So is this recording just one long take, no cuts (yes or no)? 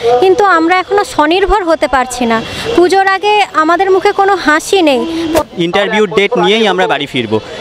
no